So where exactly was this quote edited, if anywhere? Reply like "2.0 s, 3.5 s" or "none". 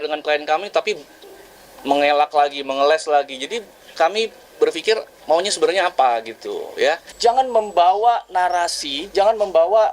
7.1 s